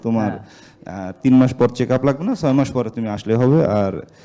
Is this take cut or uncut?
uncut